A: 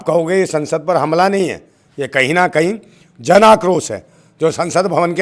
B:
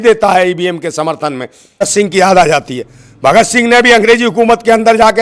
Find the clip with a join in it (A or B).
B